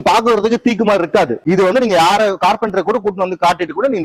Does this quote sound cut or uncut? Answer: cut